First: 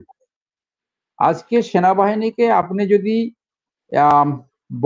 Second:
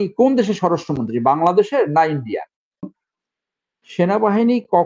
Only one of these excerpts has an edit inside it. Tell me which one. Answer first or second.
second